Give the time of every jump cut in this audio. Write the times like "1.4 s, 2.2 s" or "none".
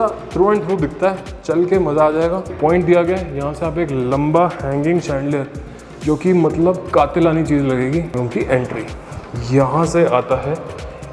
2.5 s, 8.1 s